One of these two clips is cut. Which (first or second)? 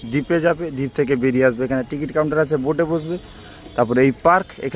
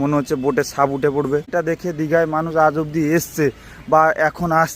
second